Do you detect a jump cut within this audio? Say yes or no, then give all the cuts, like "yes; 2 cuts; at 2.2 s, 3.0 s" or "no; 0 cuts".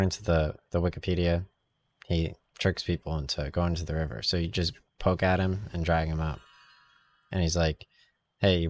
no; 0 cuts